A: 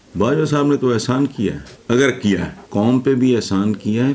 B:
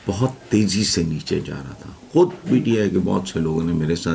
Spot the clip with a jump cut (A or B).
A